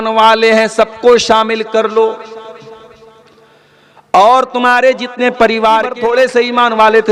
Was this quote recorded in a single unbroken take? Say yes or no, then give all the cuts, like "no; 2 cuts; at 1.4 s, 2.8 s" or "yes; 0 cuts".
no; 1 cut; at 5.9 s